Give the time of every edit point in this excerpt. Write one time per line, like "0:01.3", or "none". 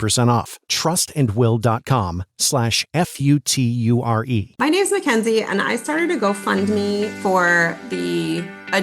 0:04.5

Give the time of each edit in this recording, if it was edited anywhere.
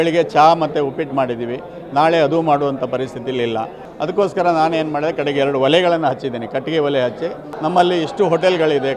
0:03.8
0:07.5

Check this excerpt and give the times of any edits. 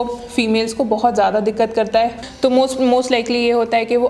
0:02.2

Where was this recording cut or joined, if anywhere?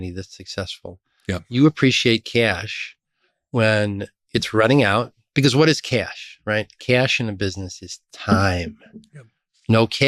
0:05.2

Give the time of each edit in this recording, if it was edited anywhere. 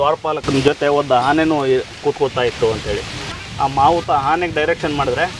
none

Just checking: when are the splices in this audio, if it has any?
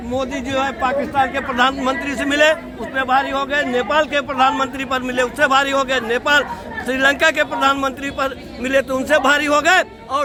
none

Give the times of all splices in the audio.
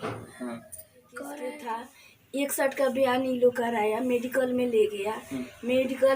0:01.3

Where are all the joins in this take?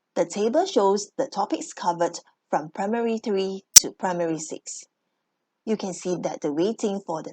0:01.1

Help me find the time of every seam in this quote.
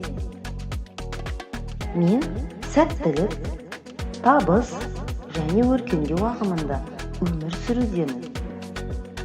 0:08.3

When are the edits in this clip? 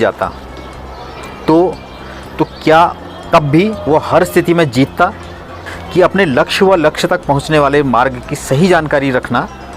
0:05.6

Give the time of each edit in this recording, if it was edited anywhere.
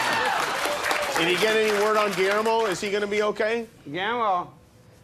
0:03.2

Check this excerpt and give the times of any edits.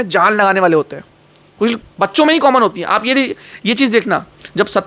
0:01.9

